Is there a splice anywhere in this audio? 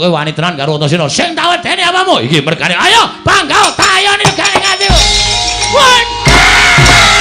no; 0 cuts

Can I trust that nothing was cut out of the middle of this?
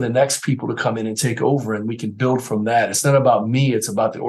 yes; 0 cuts

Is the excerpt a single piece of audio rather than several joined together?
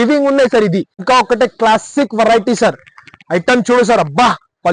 no; 1 cut; at 1.1 s

